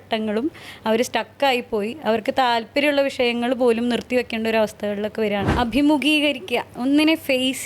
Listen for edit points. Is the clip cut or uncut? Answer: cut